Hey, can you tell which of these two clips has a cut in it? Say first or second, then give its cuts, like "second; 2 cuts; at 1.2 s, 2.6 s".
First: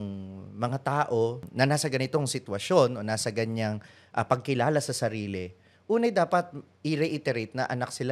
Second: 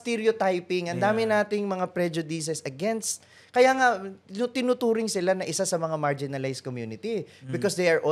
first; 1 cut; at 1.4 s